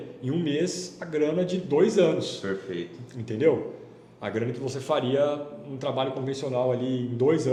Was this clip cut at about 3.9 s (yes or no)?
no